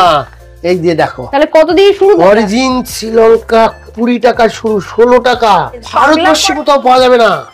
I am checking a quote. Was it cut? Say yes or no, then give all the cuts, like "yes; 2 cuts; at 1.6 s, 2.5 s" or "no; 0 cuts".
yes; 1 cut; at 5.9 s